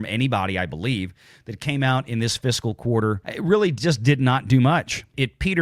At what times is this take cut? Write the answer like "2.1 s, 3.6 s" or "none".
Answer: 3.3 s